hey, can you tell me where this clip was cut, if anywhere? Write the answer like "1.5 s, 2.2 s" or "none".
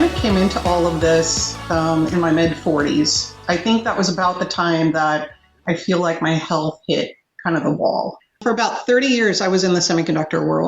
3.4 s, 8.3 s